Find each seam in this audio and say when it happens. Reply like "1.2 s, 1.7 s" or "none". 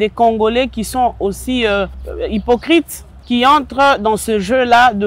2.0 s